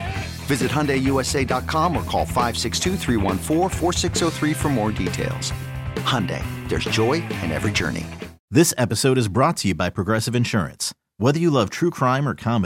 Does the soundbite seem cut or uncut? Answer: cut